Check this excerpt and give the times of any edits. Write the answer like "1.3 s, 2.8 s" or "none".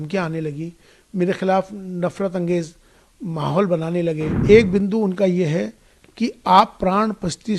4.3 s